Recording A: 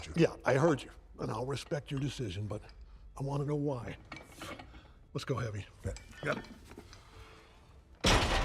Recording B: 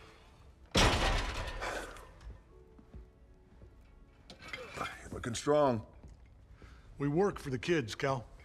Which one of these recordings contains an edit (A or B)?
A